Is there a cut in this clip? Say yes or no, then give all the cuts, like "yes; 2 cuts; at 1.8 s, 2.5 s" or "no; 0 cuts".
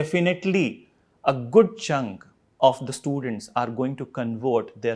no; 0 cuts